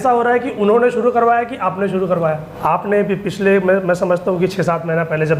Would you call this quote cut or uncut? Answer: cut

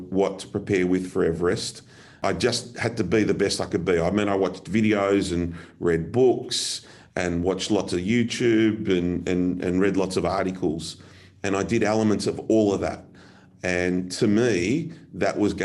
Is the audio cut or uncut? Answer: cut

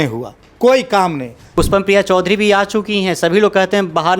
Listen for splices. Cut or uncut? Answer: cut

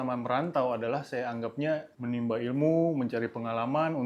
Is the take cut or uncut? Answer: cut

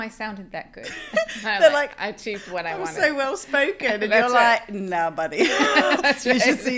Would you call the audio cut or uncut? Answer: uncut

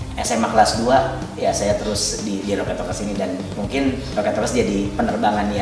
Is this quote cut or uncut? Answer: uncut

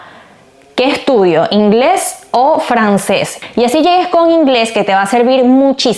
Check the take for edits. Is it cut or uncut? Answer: cut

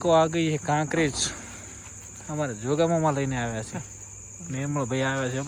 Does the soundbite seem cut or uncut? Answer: uncut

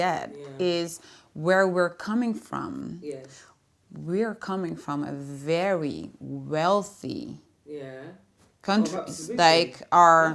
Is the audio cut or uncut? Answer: uncut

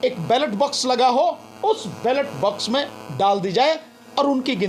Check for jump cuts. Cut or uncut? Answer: uncut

